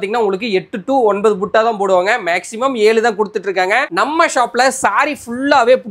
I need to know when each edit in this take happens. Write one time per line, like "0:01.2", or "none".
none